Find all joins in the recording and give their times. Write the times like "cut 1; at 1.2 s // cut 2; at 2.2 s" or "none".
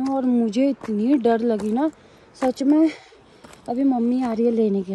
none